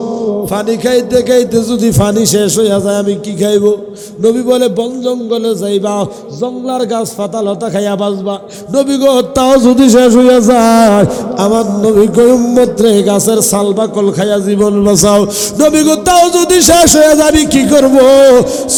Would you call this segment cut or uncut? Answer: uncut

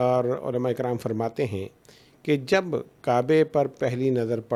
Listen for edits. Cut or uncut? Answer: uncut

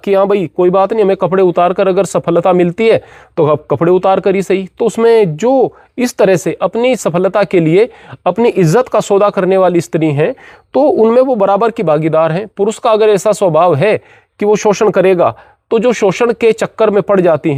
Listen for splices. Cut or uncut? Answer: uncut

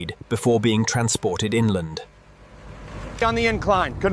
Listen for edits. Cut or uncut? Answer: cut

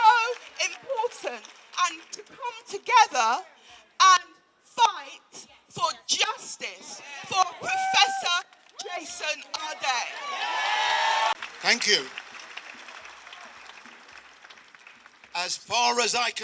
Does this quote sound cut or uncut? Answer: uncut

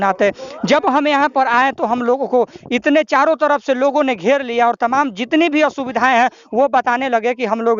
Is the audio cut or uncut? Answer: uncut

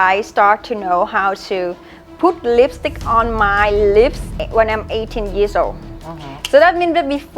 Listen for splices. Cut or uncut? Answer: cut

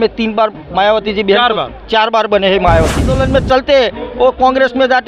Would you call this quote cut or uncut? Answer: cut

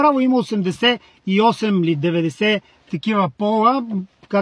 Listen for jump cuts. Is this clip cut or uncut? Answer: uncut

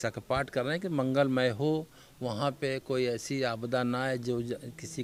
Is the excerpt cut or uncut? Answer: uncut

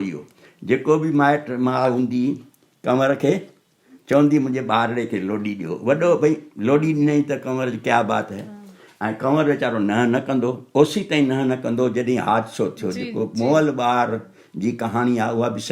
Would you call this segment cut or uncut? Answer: uncut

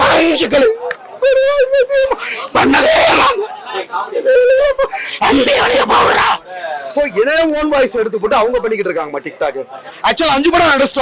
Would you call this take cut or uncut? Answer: cut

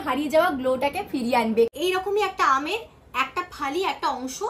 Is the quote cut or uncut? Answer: cut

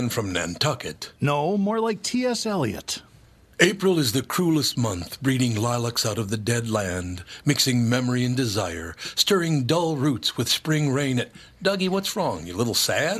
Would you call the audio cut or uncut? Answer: uncut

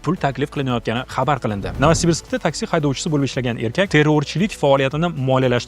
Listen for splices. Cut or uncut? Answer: cut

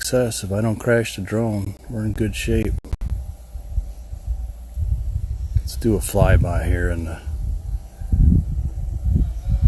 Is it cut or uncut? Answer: uncut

